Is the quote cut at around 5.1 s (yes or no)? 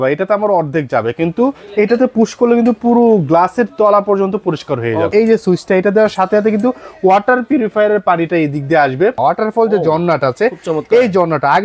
yes